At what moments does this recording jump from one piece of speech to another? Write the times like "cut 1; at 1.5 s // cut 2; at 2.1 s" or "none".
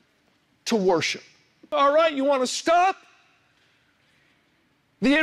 cut 1; at 1.7 s